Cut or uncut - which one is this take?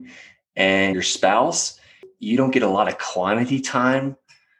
cut